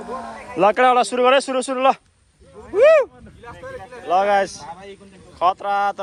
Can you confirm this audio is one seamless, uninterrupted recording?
yes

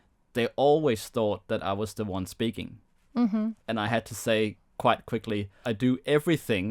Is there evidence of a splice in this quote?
yes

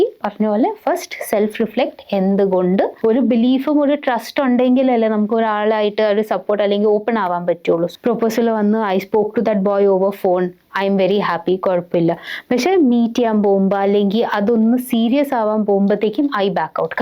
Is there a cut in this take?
yes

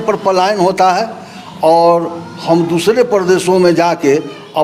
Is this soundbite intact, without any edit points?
yes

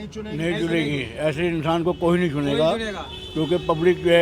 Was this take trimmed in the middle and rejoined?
no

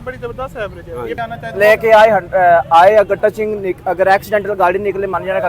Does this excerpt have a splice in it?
yes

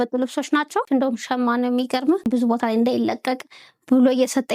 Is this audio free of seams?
no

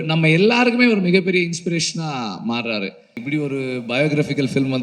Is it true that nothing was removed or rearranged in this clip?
no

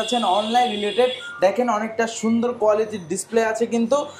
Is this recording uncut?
yes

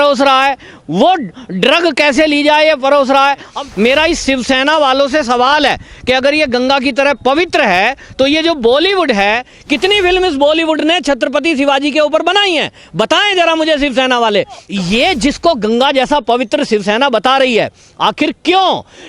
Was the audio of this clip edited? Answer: yes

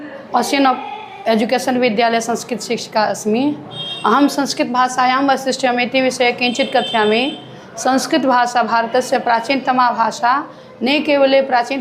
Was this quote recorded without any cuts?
yes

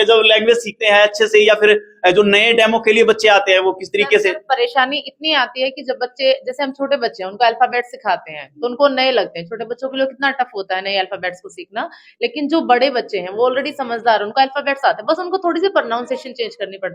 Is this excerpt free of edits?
yes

